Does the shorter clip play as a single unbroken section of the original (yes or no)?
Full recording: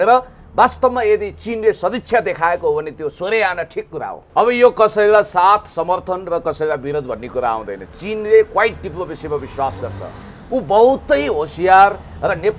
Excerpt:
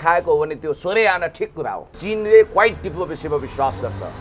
no